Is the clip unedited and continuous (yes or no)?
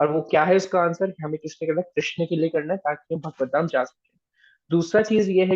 yes